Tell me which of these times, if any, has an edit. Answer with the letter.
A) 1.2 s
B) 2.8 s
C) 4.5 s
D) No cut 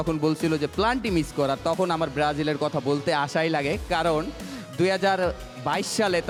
D